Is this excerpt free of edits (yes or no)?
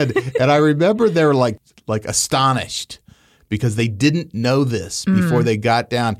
no